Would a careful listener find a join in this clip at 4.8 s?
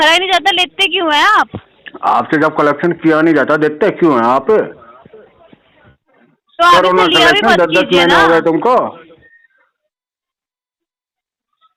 no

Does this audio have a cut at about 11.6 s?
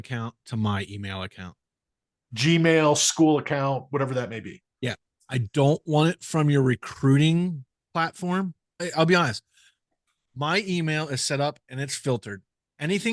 no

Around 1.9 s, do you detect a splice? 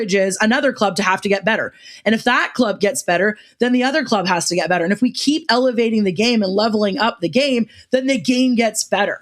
no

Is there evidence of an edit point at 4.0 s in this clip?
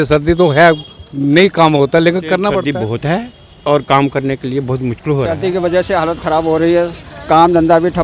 no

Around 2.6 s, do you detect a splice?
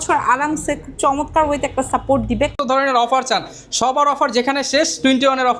yes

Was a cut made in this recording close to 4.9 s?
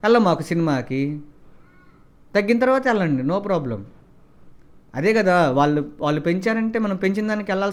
no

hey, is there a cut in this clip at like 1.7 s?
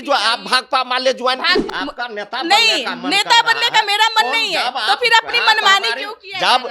yes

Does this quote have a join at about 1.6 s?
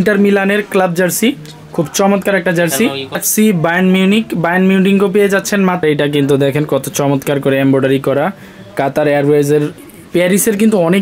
no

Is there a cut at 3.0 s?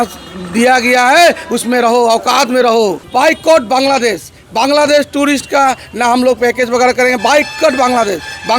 yes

